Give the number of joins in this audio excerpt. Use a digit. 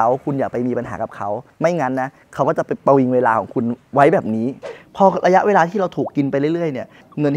2